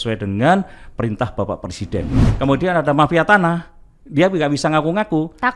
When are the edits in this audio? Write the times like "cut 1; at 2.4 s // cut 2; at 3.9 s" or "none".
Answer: cut 1; at 2.3 s